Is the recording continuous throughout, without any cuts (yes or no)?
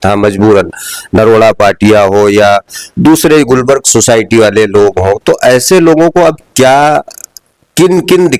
yes